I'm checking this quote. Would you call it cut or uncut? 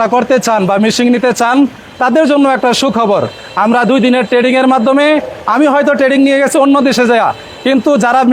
uncut